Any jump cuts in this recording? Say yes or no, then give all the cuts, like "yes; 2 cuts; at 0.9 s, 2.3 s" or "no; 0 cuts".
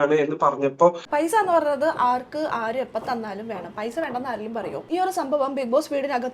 yes; 2 cuts; at 1.1 s, 4.9 s